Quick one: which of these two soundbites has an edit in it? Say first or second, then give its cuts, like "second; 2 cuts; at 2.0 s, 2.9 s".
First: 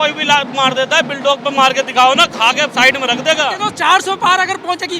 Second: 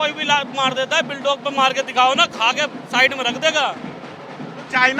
first; 2 cuts; at 2.7 s, 3.6 s